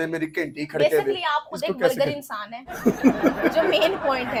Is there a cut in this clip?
no; 0 cuts

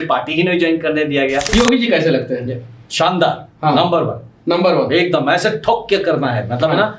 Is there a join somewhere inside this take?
yes; 1 cut; at 1.5 s

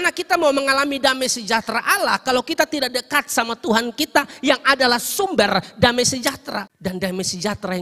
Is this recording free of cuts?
no; 1 cut; at 6.7 s

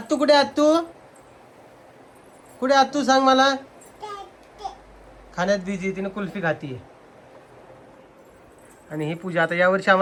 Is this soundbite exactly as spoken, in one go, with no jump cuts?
yes; 0 cuts

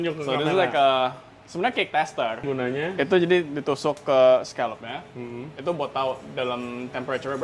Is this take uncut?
no; 1 cut; at 2.4 s

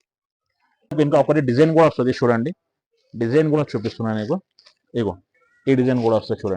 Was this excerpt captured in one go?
no; 1 cut; at 0.9 s

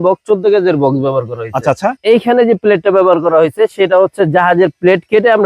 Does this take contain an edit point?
yes; 1 cut; at 2.0 s

